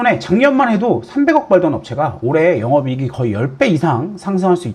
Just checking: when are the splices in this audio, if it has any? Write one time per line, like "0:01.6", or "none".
none